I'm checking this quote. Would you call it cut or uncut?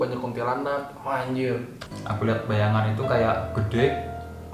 cut